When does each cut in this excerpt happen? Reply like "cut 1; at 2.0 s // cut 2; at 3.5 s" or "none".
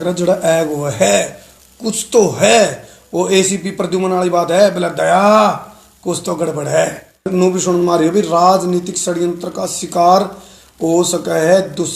cut 1; at 7.3 s